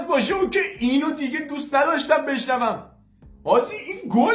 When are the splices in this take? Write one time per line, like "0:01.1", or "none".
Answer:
0:02.9